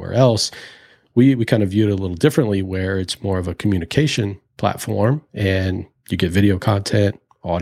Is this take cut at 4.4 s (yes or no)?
yes